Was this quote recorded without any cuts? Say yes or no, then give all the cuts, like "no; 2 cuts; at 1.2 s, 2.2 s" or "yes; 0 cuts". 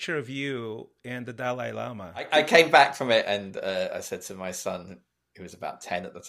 no; 1 cut; at 2.3 s